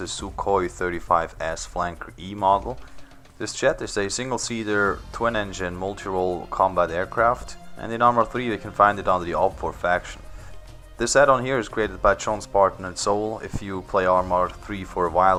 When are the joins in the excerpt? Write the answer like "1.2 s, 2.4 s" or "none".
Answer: none